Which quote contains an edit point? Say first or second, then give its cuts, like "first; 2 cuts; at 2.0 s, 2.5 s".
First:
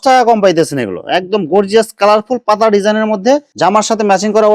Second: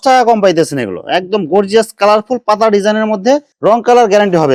first; 1 cut; at 3.5 s